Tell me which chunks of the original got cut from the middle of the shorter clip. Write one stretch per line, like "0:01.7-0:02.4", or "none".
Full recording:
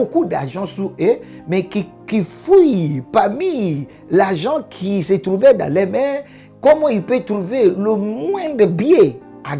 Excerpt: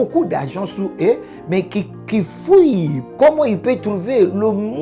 0:03.0-0:06.4

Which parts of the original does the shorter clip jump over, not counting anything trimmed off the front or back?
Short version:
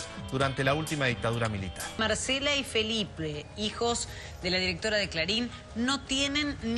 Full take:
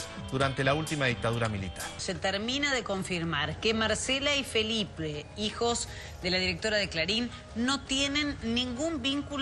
0:02.0-0:03.8

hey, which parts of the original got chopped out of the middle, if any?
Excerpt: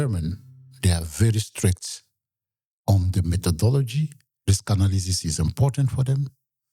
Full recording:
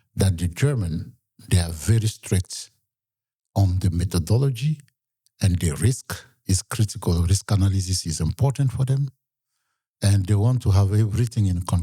0:05.1-0:07.3

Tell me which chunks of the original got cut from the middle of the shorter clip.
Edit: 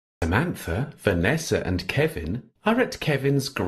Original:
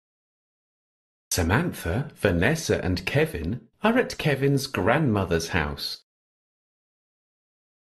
none

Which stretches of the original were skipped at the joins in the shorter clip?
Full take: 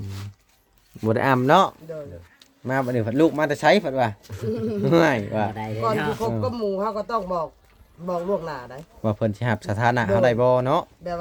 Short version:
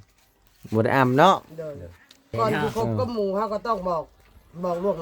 0:02.5-0:05.6

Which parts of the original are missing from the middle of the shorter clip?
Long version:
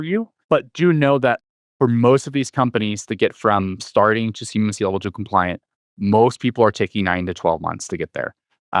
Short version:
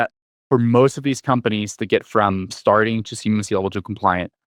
none

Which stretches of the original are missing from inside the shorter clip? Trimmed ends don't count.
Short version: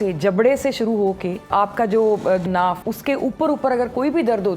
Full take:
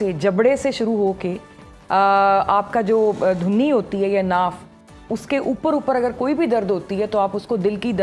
0:01.5-0:02.4
0:03.4-0:04.7

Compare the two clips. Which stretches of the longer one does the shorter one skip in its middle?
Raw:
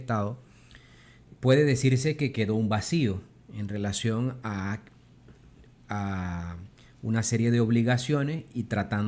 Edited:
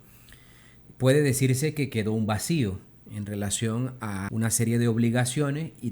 0:04.7-0:07.0

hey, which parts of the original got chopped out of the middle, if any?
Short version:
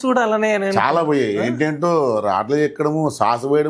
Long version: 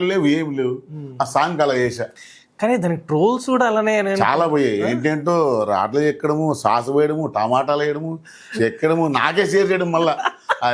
none

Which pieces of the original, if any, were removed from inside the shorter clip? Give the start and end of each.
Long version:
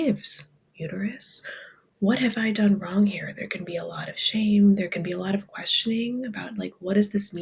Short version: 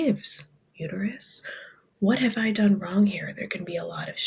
none

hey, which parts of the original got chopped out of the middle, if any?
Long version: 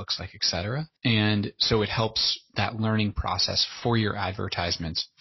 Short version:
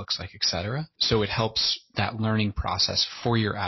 0:00.9-0:01.5

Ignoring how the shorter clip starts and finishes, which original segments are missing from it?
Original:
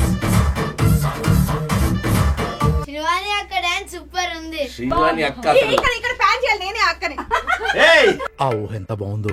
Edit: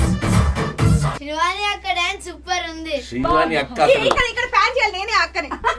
0:01.2-0:02.8

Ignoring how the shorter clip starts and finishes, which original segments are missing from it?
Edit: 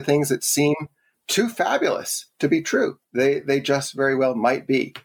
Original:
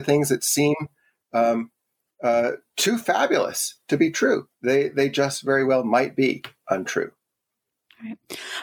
0:01.2-0:02.7

